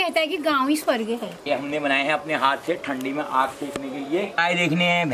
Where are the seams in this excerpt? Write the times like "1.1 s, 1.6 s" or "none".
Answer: 1.4 s, 4.4 s